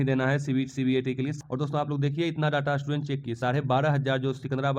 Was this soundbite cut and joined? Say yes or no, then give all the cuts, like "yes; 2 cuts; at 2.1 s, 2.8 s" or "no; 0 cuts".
yes; 1 cut; at 1.4 s